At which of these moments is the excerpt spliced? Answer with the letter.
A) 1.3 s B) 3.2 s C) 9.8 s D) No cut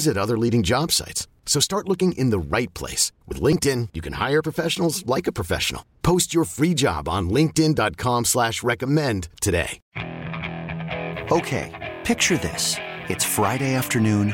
C